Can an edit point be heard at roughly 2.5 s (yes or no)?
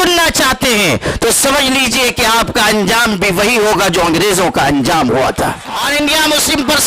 no